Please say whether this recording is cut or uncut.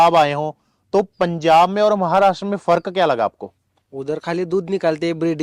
uncut